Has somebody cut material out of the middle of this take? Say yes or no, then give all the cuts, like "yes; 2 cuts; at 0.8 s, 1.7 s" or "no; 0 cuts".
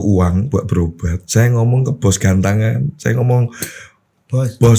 no; 0 cuts